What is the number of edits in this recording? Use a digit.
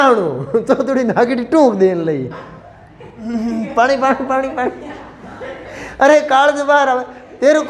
1